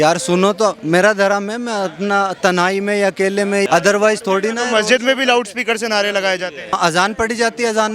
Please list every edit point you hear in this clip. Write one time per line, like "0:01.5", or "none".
0:03.7
0:06.8